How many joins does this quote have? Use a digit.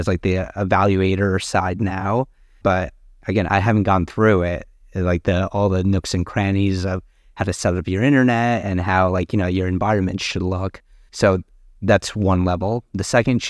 0